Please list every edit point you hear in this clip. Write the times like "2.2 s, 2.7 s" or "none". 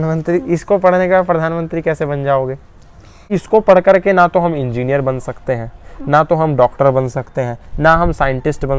3.3 s